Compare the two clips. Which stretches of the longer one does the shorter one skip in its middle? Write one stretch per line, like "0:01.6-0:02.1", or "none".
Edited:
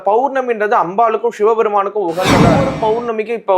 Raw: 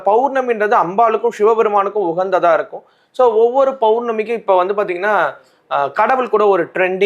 0:02.6-0:03.6